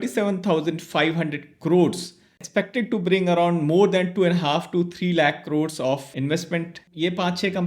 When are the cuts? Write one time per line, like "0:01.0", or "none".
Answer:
0:02.4
0:06.7